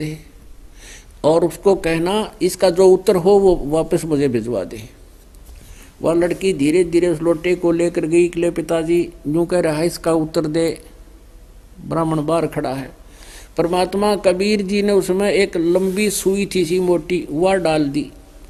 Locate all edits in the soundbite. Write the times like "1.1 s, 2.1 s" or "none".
none